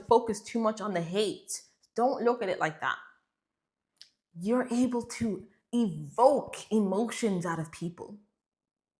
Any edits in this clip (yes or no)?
no